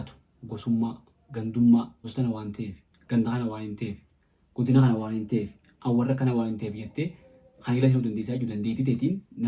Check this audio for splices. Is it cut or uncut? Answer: cut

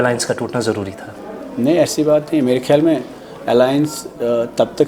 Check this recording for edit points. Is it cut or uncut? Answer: uncut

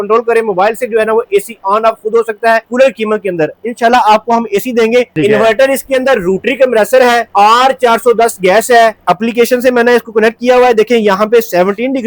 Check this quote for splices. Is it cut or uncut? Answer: cut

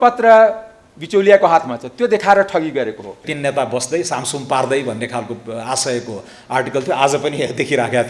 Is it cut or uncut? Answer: cut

